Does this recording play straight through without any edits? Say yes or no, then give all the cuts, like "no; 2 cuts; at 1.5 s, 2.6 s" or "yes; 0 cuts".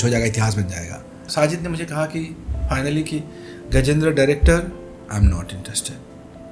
no; 1 cut; at 1.2 s